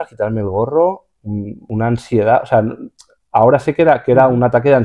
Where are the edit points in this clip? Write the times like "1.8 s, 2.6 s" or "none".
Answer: 1.6 s